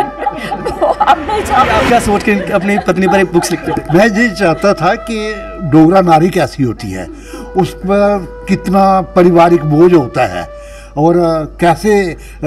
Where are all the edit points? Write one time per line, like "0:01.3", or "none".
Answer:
0:01.8